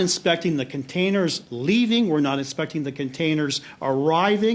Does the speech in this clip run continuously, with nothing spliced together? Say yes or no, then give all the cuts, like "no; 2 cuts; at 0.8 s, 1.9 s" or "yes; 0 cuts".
yes; 0 cuts